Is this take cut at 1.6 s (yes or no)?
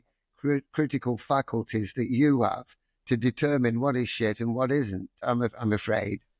no